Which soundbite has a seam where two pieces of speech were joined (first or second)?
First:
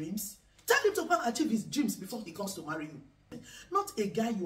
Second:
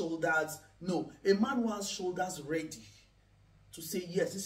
first